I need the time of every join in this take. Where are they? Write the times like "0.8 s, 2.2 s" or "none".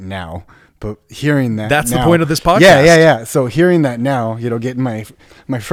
none